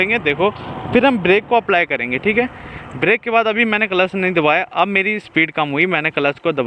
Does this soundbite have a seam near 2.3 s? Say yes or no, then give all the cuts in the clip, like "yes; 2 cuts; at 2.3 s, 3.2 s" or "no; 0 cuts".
no; 0 cuts